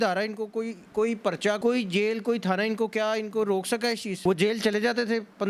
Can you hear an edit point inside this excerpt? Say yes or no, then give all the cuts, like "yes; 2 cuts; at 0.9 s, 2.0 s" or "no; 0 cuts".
yes; 2 cuts; at 1.6 s, 4.1 s